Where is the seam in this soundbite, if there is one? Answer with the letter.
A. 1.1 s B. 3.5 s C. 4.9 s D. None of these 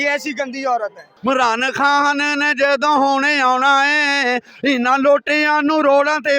A